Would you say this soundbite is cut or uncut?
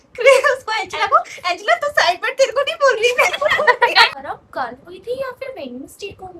cut